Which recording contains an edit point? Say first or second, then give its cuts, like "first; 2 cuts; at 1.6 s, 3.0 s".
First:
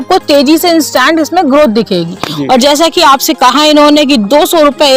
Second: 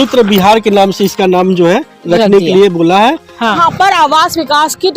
second; 1 cut; at 3.6 s